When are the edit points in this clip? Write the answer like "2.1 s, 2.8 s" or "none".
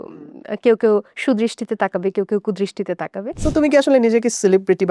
3.3 s